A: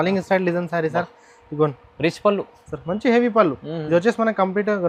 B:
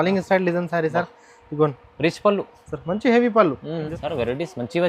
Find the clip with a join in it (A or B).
B